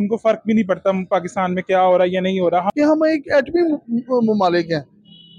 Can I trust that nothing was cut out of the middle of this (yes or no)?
no